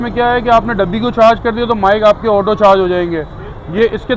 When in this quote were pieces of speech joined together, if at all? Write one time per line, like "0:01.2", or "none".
none